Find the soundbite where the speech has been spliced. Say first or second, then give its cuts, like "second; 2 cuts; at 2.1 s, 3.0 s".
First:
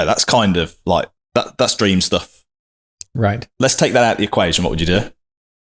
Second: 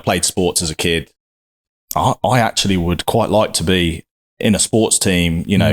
second; 1 cut; at 1.4 s